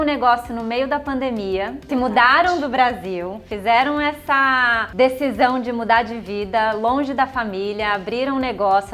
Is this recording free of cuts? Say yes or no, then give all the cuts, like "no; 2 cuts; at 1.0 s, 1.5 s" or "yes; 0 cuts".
no; 2 cuts; at 1.8 s, 4.8 s